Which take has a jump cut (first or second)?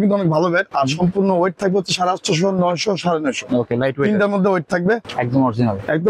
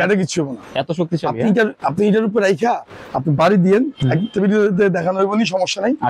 first